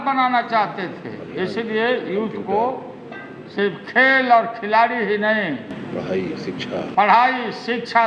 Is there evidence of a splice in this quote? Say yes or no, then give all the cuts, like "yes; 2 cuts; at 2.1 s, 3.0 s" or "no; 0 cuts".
no; 0 cuts